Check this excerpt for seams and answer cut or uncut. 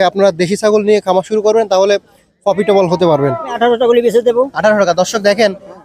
cut